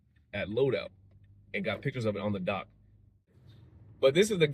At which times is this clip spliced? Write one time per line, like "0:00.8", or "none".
0:03.4